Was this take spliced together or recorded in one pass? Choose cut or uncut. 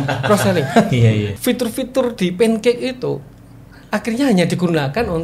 cut